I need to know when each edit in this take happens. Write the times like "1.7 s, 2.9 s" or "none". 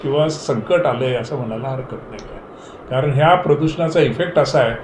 none

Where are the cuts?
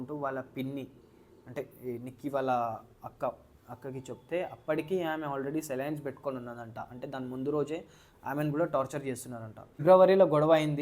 9.8 s

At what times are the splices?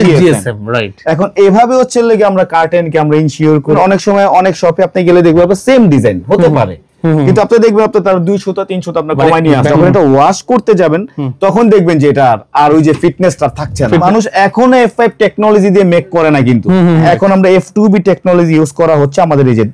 3.8 s, 9.7 s, 14.0 s, 17.0 s

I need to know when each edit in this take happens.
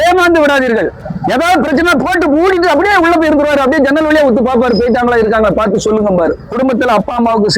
1.0 s, 6.4 s

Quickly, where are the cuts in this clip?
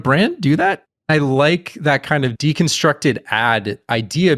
0.9 s

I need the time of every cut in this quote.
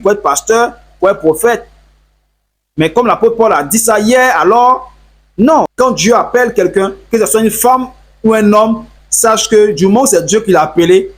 5.7 s

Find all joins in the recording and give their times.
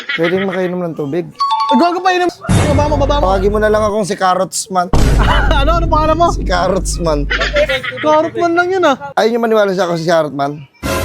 2.3 s, 9.1 s

